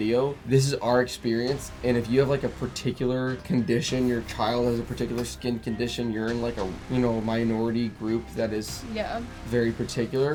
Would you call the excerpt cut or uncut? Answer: uncut